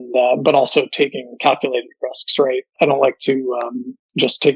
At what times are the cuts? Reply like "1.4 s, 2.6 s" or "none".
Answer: 2.8 s